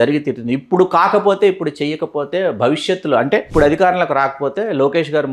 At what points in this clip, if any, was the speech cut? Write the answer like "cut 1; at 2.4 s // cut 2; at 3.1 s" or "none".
cut 1; at 3.5 s

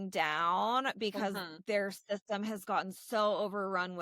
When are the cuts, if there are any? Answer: none

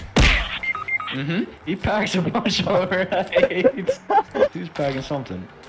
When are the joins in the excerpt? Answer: cut 1; at 4.6 s

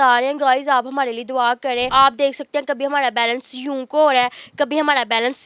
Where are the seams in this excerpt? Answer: cut 1; at 1.9 s

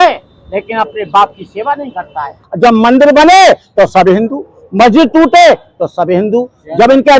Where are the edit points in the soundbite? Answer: cut 1; at 2.4 s

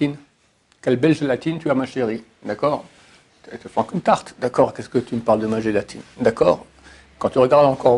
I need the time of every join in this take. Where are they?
none

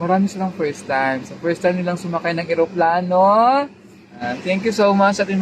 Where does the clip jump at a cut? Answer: cut 1; at 4.3 s

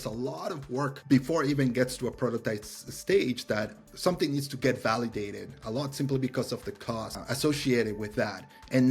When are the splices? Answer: cut 1; at 1.0 s // cut 2; at 7.2 s

